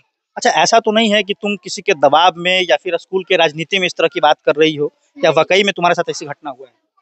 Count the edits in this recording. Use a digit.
0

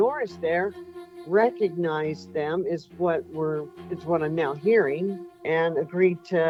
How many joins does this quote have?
0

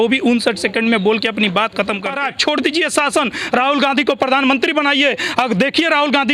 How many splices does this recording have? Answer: 1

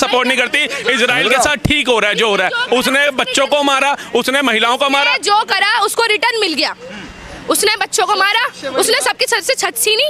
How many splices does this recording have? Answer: 0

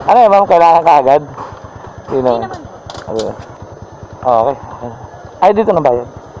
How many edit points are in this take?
1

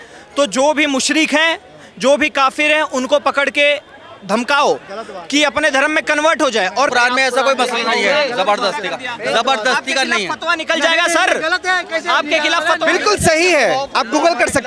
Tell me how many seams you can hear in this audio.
1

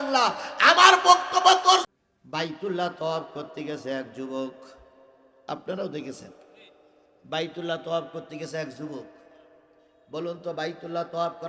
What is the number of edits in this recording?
1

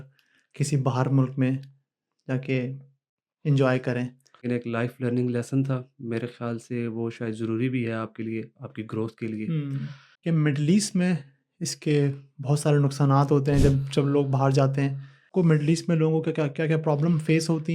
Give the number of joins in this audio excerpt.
3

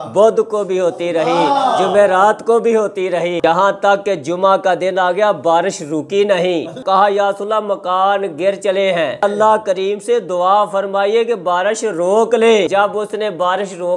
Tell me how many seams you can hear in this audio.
3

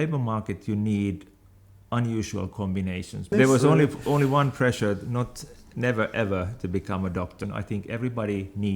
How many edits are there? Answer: 2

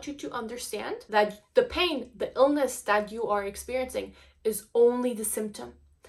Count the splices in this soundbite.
1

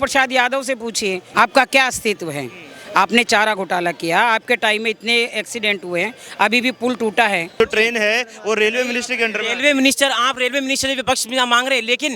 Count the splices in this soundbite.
2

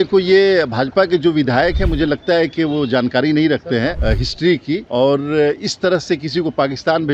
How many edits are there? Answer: 1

